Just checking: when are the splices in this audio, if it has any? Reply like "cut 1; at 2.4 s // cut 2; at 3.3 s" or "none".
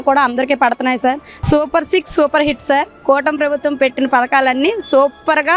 cut 1; at 1.3 s